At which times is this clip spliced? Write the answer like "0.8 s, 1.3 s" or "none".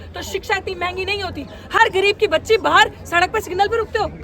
none